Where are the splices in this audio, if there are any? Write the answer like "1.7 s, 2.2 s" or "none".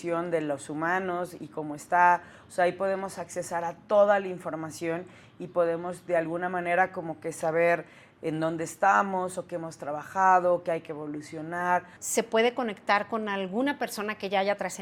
12.0 s